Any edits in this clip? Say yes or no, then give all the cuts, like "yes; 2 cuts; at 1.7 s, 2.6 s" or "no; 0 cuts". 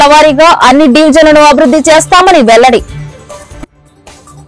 no; 0 cuts